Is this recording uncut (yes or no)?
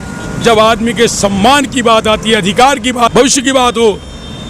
no